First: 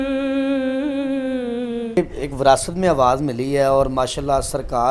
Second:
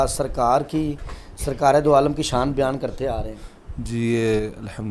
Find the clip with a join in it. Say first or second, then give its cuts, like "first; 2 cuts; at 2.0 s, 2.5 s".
first; 1 cut; at 2.0 s